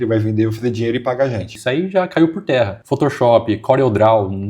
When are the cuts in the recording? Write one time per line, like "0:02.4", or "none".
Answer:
0:01.5
0:02.8